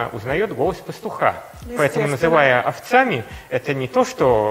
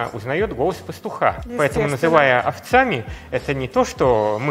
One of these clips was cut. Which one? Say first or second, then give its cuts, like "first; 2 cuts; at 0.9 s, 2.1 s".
second; 1 cut; at 1.4 s